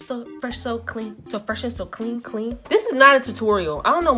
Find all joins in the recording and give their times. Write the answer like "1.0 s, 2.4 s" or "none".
2.6 s